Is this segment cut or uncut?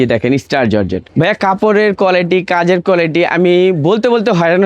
cut